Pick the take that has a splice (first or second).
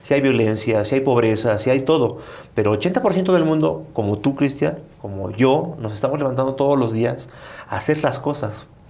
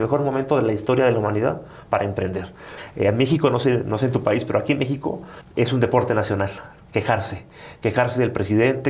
second